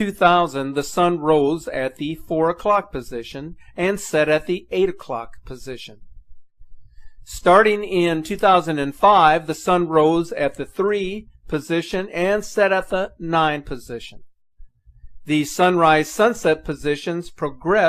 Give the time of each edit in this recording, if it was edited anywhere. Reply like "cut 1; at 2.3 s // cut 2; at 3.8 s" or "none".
cut 1; at 15.8 s